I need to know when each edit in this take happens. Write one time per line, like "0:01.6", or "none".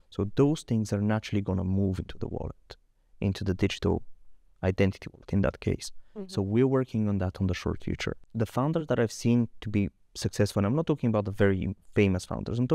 0:08.2
0:11.8

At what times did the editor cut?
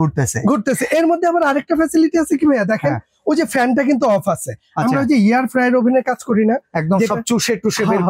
none

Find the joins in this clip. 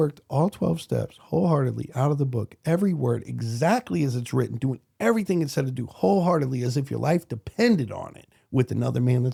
none

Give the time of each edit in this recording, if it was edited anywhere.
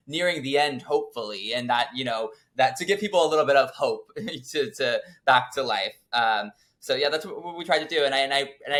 none

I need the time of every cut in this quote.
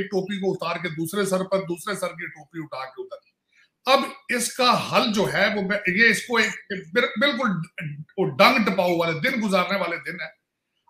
none

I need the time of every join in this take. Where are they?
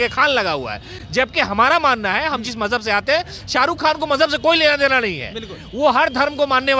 none

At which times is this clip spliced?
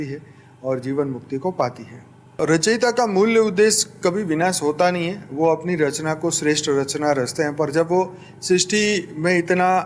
0:02.4

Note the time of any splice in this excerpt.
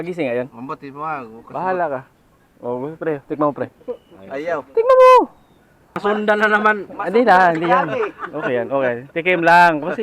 0:06.0

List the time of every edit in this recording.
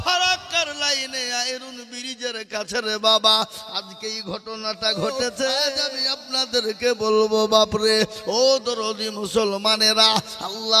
0:05.8

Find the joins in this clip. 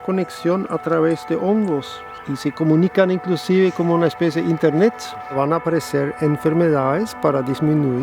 0:02.1
0:05.3

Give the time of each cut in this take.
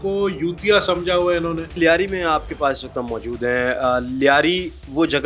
none

